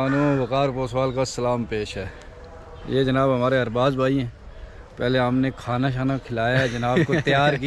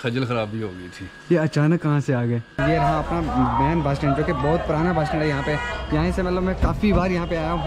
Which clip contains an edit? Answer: second; 1 cut; at 2.5 s

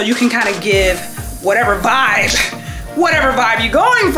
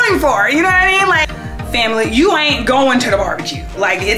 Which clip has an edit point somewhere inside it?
second; 1 cut; at 1.2 s

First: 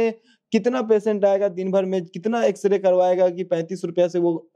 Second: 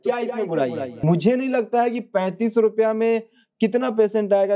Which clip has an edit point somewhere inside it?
second; 1 cut; at 0.9 s

